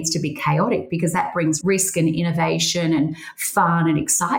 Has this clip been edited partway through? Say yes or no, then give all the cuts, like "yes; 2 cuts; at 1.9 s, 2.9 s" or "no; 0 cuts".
no; 0 cuts